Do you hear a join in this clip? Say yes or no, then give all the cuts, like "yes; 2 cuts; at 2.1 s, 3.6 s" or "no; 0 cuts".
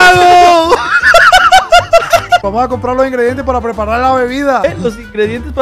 yes; 2 cuts; at 2.4 s, 4.6 s